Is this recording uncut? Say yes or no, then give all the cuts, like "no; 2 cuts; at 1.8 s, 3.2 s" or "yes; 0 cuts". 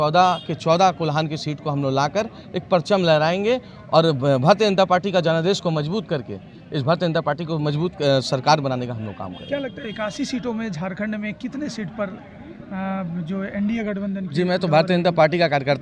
yes; 0 cuts